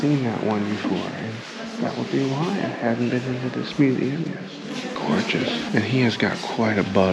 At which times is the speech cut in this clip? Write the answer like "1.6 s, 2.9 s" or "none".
none